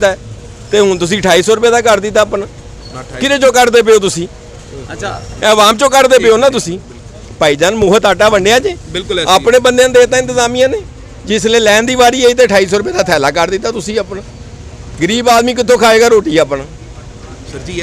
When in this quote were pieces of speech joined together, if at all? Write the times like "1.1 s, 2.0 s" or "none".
none